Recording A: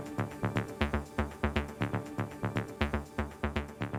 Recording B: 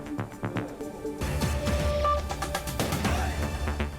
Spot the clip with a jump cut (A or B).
B